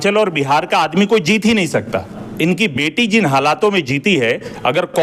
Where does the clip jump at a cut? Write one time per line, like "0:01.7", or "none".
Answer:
0:02.2